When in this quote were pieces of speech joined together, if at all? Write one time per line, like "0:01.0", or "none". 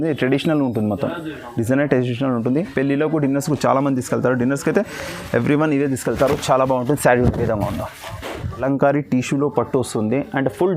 0:08.6